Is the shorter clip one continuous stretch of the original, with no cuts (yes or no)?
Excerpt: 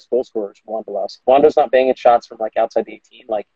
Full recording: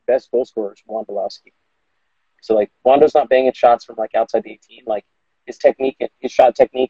no